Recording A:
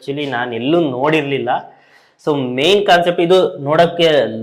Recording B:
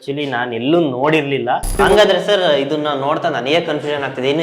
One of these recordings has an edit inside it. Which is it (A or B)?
B